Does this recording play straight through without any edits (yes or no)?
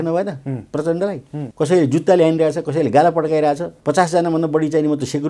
no